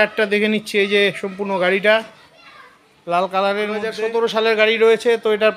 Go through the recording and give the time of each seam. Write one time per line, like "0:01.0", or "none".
0:03.9

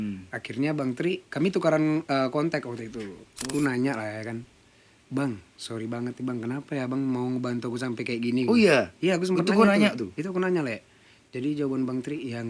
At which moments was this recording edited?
0:03.5

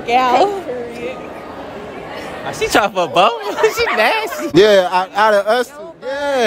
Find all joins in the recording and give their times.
0:04.5

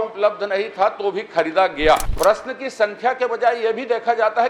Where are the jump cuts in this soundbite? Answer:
0:02.1

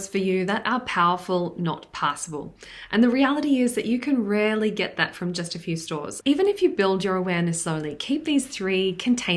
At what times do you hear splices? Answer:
0:06.1

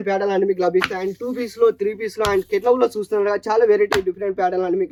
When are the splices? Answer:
none

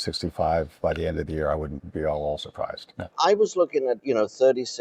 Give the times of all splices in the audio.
0:01.8
0:03.1
0:04.0

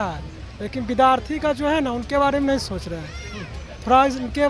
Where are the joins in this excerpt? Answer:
none

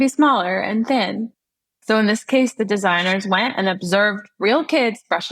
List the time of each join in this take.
0:01.8

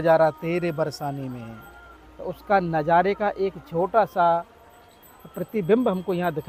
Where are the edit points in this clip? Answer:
none

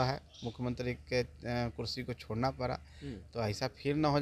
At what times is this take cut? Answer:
none

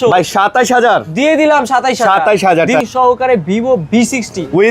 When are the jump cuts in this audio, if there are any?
0:02.8

